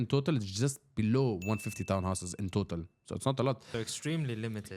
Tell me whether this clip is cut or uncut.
cut